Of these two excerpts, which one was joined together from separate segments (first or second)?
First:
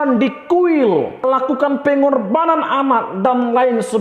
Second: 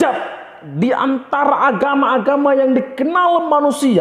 first